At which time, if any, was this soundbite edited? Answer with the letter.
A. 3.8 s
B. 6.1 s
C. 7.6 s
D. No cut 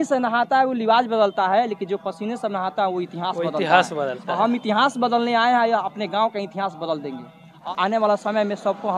C